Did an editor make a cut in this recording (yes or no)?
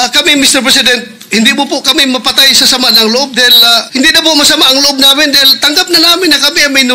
yes